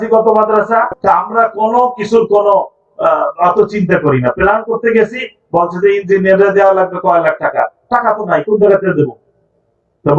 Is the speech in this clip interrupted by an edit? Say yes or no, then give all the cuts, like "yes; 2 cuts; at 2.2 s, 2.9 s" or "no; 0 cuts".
yes; 1 cut; at 0.9 s